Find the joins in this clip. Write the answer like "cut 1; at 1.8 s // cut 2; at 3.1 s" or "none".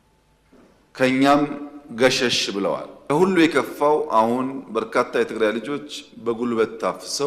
cut 1; at 2.9 s